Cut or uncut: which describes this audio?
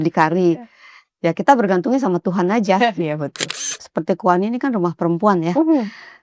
cut